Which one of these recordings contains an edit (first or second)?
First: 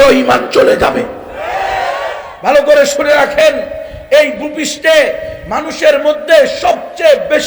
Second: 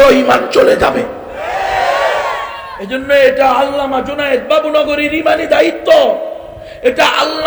first